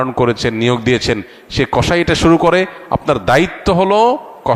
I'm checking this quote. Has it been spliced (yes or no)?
no